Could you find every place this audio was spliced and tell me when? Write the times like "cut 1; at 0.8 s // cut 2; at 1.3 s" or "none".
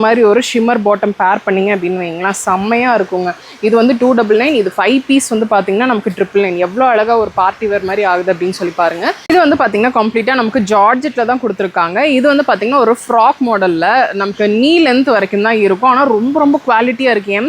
cut 1; at 9.2 s